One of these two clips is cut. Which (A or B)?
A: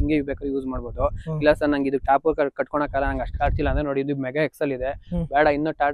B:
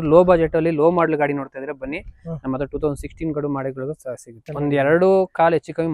B